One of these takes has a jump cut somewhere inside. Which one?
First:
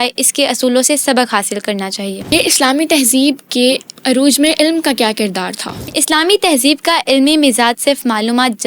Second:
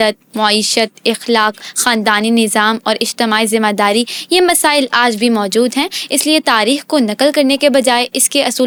first; 3 cuts; at 2.3 s, 3.9 s, 5.8 s

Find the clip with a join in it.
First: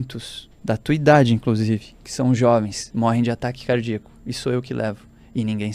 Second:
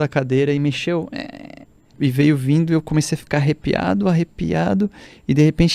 second; 1 cut; at 1.9 s

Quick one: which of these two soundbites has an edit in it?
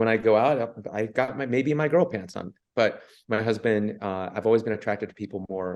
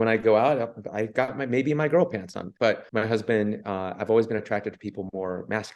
second; 1 cut; at 2.7 s

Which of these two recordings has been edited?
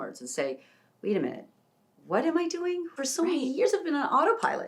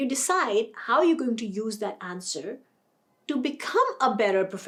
first; 1 cut; at 2.9 s

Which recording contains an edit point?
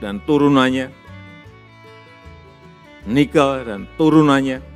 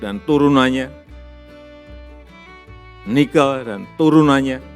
second; 2 cuts; at 1.3 s, 3.0 s

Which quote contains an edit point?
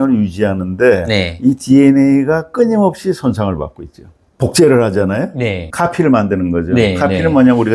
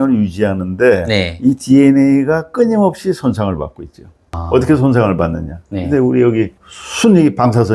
first; 1 cut; at 4.2 s

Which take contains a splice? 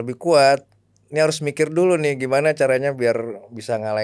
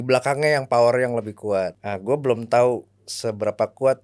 second; 1 cut; at 1.8 s

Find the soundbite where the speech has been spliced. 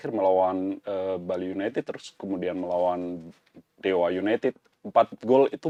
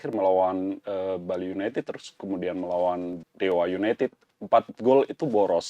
second; 1 cut; at 3.2 s

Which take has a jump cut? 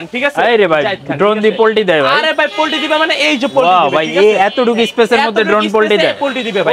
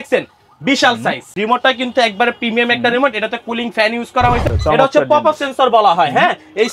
second; 2 cuts; at 1.4 s, 4.5 s

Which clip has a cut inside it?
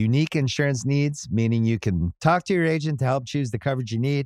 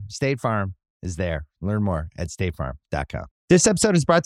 second; 1 cut; at 3.3 s

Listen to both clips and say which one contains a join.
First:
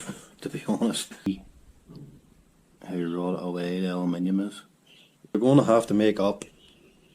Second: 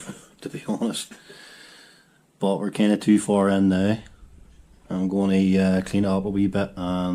first; 2 cuts; at 1.3 s, 5.3 s

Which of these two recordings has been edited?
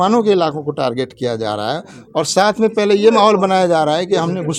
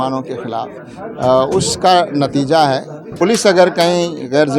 second; 1 cut; at 3.0 s

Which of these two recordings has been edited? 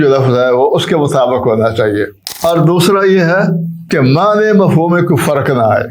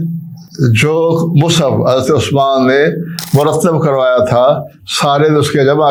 first; 2 cuts; at 2.2 s, 3.7 s

